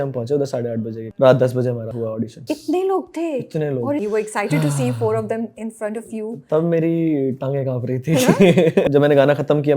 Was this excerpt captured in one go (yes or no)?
no